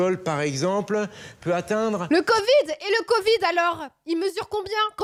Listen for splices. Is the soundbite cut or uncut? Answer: uncut